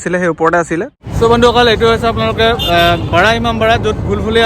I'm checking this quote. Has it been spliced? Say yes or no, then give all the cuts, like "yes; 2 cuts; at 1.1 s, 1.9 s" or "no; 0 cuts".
yes; 1 cut; at 0.9 s